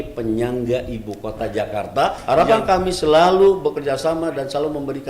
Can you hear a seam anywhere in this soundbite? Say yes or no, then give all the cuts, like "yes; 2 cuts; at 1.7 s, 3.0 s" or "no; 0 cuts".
yes; 1 cut; at 2.2 s